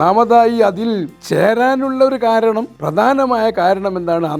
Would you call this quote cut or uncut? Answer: cut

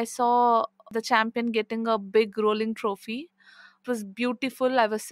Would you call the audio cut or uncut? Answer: cut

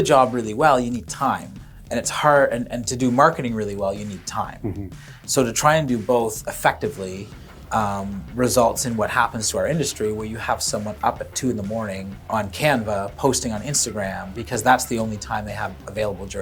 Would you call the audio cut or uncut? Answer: uncut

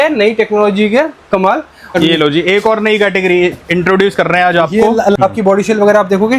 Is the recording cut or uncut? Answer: cut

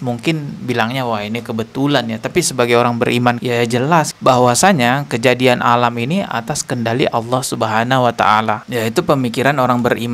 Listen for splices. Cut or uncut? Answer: uncut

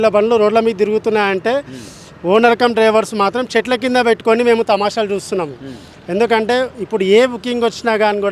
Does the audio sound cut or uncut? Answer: uncut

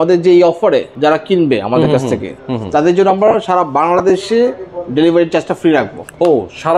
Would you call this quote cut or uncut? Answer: cut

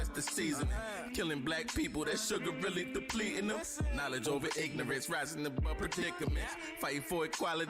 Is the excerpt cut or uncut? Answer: uncut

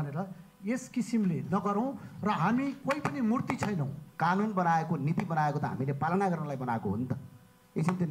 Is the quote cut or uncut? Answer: cut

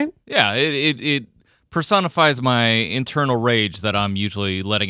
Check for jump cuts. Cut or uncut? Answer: uncut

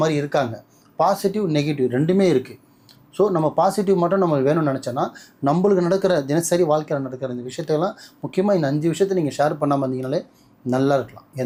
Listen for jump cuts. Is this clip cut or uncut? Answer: uncut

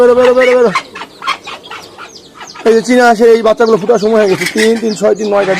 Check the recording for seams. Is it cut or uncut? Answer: uncut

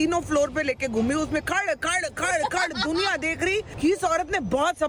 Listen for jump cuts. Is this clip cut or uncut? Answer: uncut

